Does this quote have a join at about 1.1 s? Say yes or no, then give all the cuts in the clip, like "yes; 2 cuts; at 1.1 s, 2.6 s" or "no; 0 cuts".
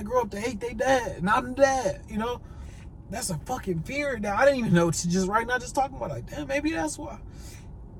no; 0 cuts